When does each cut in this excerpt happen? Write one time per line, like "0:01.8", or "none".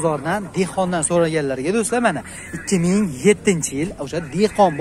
none